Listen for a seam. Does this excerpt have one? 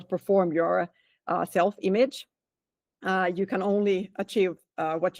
no; 0 cuts

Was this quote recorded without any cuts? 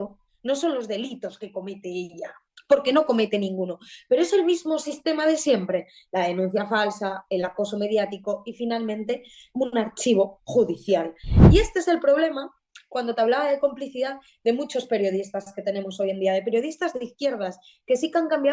no; 1 cut; at 11.3 s

